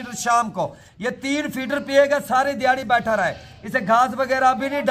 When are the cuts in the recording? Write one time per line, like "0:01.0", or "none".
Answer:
none